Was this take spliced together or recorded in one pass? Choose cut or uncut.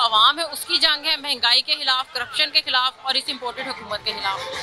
uncut